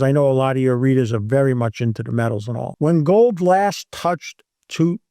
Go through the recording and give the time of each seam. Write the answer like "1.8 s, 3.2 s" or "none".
2.7 s